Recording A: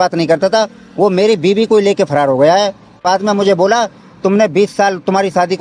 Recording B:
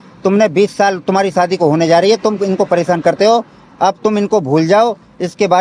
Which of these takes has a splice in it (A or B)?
A